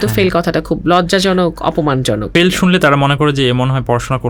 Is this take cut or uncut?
cut